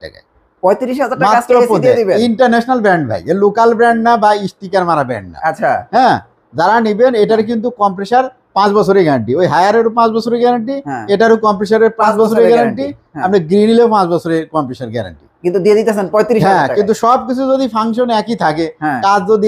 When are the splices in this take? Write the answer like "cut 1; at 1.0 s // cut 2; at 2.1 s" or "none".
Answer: none